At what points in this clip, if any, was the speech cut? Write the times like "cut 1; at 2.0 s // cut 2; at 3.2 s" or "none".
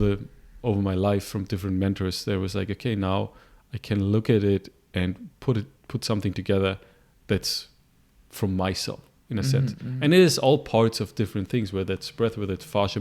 none